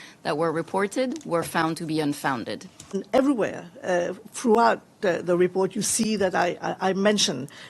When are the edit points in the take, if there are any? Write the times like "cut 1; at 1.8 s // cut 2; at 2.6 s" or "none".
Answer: cut 1; at 2.9 s

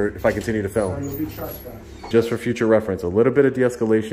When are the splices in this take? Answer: cut 1; at 2.0 s

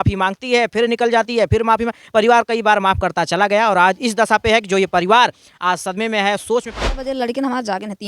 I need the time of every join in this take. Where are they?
cut 1; at 6.8 s

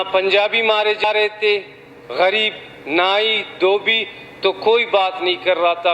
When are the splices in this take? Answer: cut 1; at 1.0 s

